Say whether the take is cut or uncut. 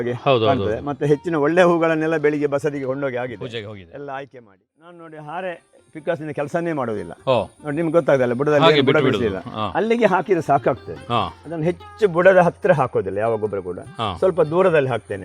cut